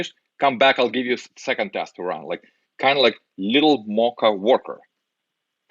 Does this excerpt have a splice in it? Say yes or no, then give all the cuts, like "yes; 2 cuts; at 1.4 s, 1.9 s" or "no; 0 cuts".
no; 0 cuts